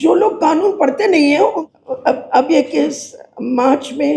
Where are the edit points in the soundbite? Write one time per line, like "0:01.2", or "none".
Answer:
0:01.6